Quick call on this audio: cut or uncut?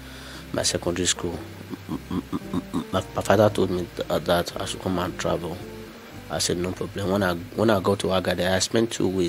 uncut